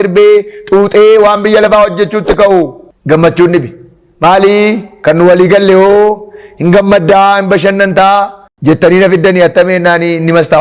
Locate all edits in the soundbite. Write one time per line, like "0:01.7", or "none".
0:02.9
0:04.9
0:08.4

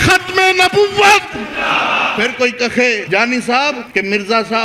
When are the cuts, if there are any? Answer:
0:02.1
0:03.0
0:03.8

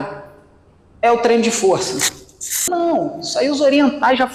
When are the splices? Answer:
0:02.7

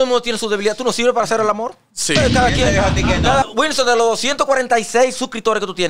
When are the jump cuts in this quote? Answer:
0:03.5

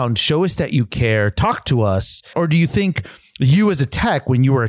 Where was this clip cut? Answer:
0:02.3

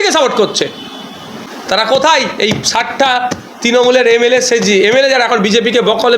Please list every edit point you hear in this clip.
0:01.4

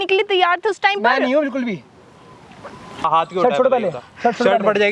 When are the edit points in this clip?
0:03.1

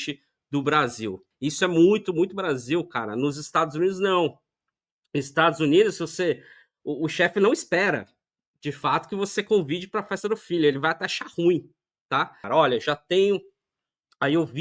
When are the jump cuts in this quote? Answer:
0:01.2
0:12.4

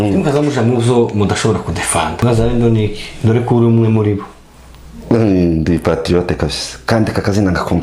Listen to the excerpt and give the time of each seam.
0:02.1

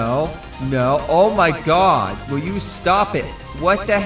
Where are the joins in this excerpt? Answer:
none

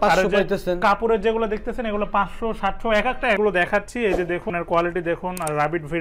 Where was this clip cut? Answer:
0:03.4
0:04.5

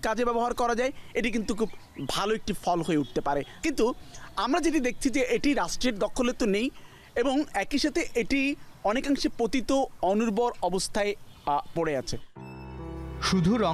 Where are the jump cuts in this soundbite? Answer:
none

